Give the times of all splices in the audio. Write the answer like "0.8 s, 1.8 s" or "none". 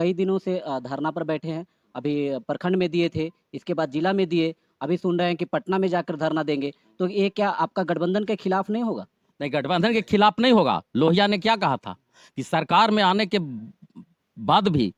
none